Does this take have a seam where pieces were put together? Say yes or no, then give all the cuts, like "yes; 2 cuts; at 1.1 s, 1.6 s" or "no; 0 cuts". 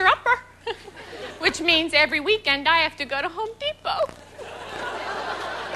yes; 1 cut; at 1.3 s